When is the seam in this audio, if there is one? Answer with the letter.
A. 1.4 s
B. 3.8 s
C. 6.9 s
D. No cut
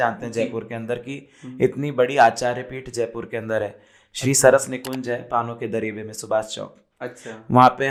D